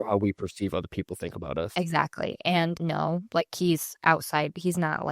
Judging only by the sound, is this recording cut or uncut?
uncut